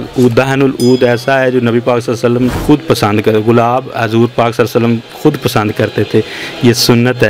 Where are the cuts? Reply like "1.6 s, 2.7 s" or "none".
none